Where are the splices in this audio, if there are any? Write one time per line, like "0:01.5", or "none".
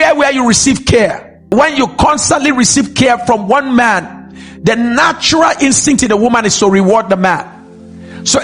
0:01.4